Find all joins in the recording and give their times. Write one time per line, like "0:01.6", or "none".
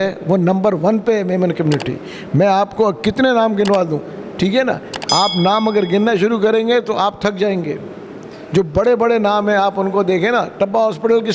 none